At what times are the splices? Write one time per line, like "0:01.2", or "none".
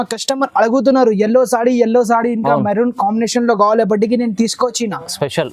none